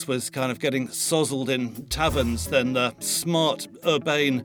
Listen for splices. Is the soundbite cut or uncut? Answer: cut